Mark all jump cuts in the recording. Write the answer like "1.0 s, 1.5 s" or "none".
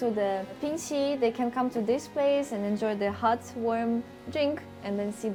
none